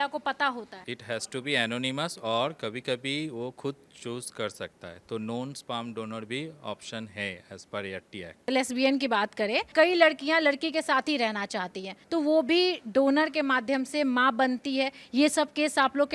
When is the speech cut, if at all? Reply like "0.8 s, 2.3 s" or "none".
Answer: 8.5 s, 9.7 s